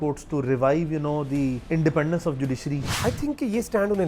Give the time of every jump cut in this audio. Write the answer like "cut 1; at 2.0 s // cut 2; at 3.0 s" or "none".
cut 1; at 1.6 s // cut 2; at 2.9 s